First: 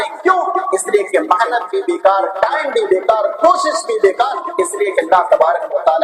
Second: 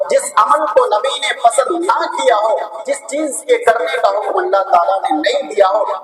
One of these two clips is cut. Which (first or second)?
first